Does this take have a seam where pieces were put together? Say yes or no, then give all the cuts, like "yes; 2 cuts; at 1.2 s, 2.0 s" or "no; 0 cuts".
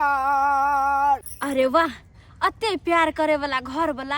yes; 1 cut; at 1.3 s